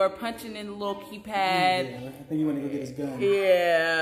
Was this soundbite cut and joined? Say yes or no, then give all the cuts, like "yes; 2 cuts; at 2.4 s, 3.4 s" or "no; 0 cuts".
yes; 1 cut; at 2.0 s